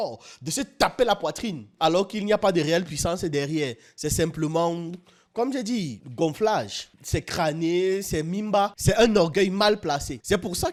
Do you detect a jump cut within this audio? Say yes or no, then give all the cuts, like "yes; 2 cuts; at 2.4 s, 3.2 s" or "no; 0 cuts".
no; 0 cuts